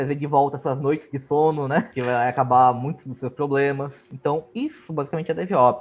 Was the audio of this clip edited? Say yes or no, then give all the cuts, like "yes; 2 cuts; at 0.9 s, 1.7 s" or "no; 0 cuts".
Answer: yes; 2 cuts; at 1.9 s, 4.4 s